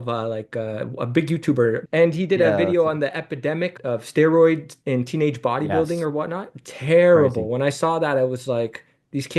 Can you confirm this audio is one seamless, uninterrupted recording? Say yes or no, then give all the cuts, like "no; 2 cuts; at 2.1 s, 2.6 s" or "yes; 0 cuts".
no; 2 cuts; at 1.8 s, 3.7 s